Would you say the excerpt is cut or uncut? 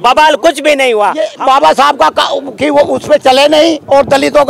cut